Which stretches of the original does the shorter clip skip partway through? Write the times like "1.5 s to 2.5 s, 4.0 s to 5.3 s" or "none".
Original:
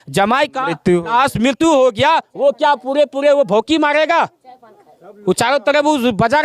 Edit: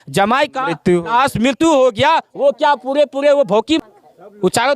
3.8 s to 4.6 s